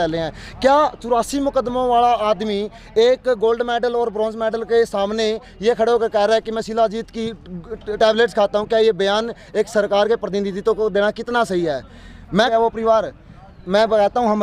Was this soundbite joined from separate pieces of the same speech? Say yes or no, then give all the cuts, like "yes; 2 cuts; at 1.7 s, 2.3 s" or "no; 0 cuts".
yes; 1 cut; at 12.5 s